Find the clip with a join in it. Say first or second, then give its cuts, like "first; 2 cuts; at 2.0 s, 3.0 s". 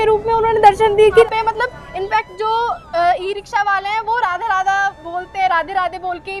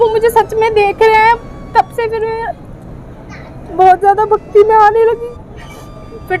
first; 1 cut; at 1.2 s